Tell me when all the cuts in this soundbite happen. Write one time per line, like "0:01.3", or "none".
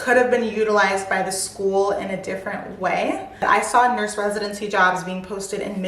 0:03.4